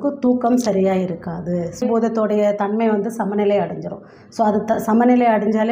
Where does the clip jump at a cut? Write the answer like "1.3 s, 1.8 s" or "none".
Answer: 1.8 s